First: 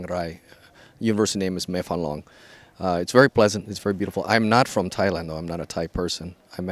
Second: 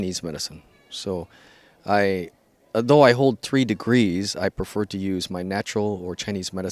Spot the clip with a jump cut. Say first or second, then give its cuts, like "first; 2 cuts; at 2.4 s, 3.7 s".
second; 1 cut; at 4.5 s